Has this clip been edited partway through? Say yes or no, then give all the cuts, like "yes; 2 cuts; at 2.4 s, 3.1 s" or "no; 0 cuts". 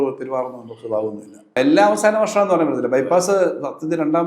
yes; 1 cut; at 1.6 s